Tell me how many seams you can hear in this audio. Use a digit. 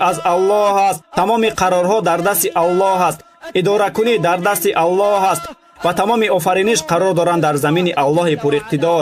0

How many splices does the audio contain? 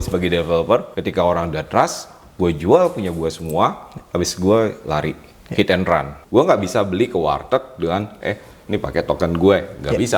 2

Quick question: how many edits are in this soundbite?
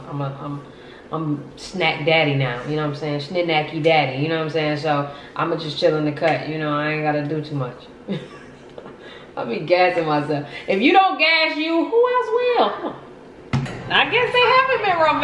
1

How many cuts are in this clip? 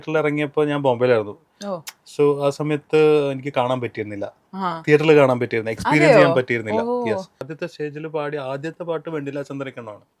1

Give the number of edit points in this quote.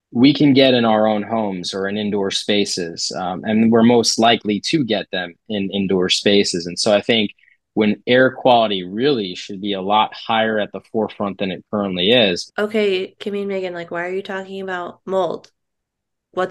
1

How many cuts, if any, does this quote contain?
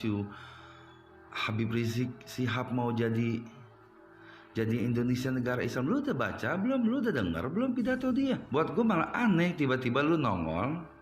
1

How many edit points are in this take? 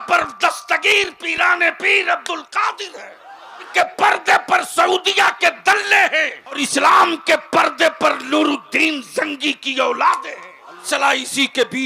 3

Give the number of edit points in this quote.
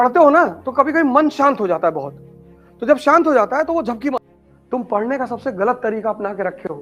1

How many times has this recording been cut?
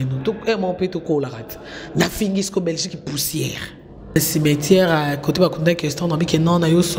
1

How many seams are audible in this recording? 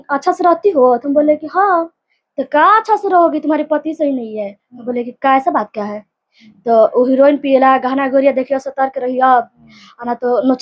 0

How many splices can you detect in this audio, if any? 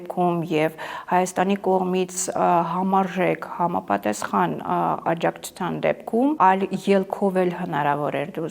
1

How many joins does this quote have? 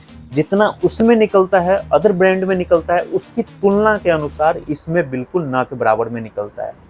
0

